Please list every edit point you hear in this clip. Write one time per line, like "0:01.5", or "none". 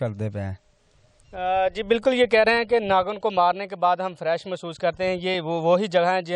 none